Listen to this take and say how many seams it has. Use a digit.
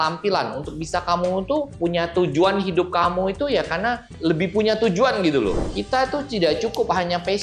3